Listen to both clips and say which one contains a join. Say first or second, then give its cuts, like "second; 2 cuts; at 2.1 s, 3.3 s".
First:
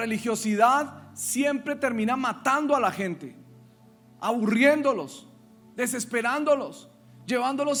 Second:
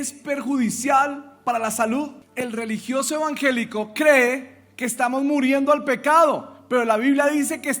second; 1 cut; at 2.2 s